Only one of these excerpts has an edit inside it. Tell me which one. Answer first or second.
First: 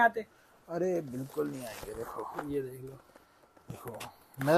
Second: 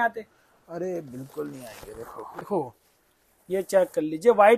second